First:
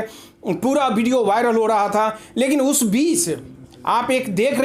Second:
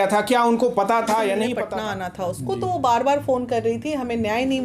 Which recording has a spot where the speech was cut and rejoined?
second; 1 cut; at 1.6 s

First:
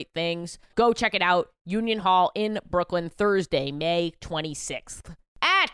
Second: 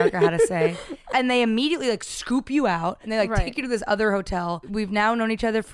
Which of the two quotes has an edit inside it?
second; 3 cuts; at 1.0 s, 3.0 s, 4.7 s

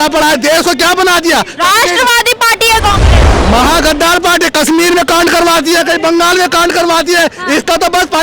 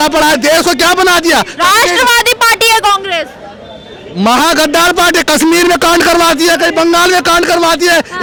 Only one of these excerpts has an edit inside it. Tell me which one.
first; 1 cut; at 3.2 s

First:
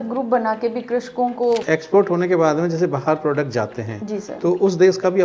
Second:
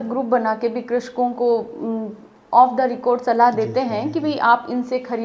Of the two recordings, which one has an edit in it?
first; 1 cut; at 1.6 s

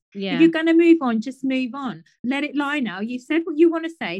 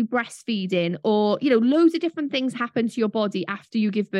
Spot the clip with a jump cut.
first; 1 cut; at 2.3 s

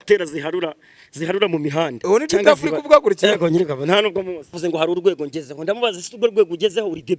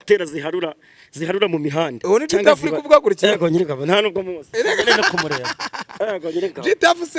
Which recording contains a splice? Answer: first; 1 cut; at 4.5 s

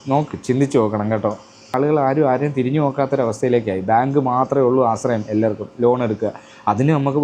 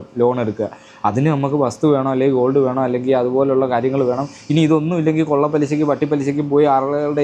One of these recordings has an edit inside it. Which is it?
first; 1 cut; at 1.8 s

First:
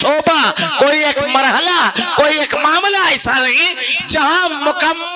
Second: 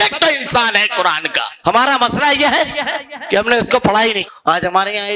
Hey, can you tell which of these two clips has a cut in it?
second; 2 cuts; at 1.5 s, 4.2 s

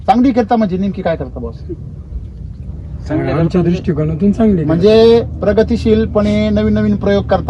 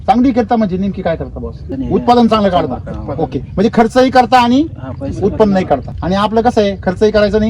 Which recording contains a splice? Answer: second; 2 cuts; at 1.7 s, 5.9 s

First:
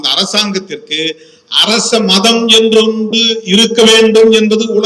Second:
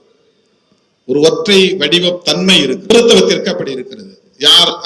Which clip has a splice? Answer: second; 1 cut; at 2.9 s

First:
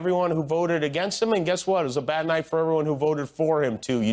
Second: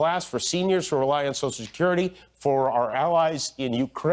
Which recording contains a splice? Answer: second; 1 cut; at 3.1 s

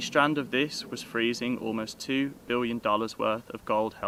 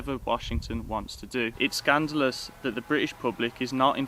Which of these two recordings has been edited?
second; 1 cut; at 1.5 s

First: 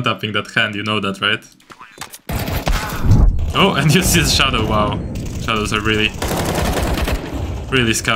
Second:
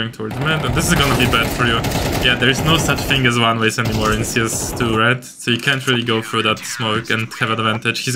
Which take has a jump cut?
first; 1 cut; at 3.3 s

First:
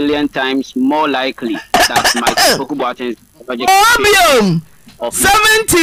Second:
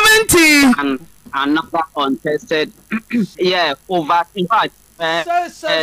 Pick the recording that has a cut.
second; 1 cut; at 3.3 s

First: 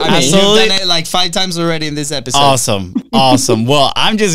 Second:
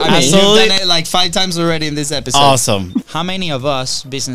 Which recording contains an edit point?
second; 1 cut; at 3.1 s

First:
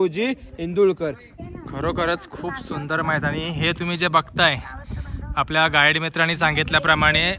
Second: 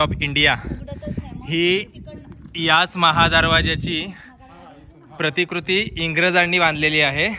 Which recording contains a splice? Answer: first; 1 cut; at 1.3 s

